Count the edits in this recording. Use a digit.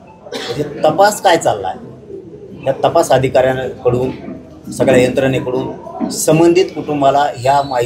0